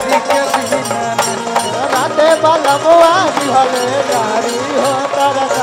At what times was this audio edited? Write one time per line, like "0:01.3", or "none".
none

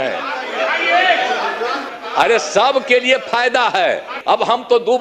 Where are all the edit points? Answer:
0:01.8
0:04.2

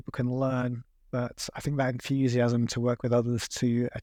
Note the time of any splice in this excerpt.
none

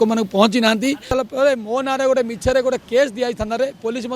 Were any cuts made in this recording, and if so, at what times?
0:01.1

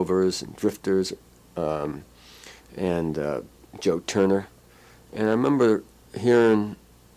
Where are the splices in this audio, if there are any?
0:01.9

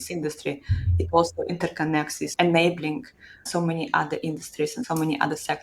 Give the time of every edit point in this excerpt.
0:02.3
0:03.5
0:04.8

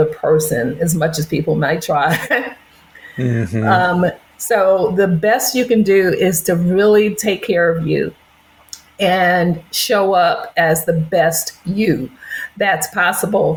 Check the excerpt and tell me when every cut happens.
none

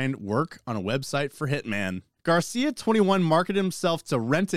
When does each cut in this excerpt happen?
0:02.1

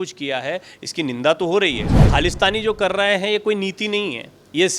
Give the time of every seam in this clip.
0:01.9

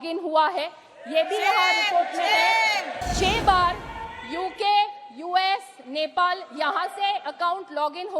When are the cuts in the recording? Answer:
0:03.0

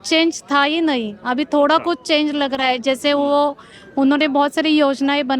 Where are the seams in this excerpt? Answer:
none

